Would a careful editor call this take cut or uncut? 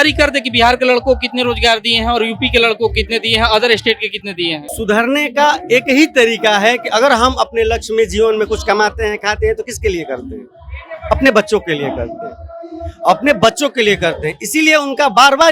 cut